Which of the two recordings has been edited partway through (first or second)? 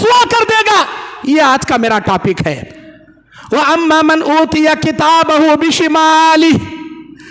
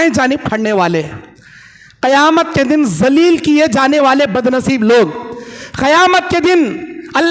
first